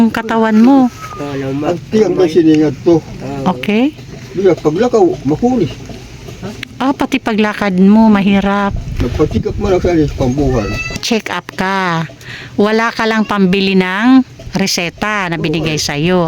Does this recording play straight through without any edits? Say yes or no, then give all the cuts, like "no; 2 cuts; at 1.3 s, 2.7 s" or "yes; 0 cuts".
no; 1 cut; at 11.0 s